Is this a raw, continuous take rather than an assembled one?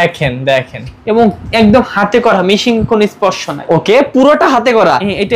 yes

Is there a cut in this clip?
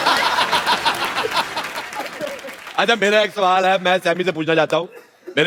no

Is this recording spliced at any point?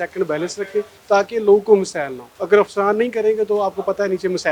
yes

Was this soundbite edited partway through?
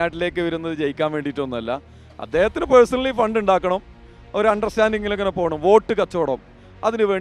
no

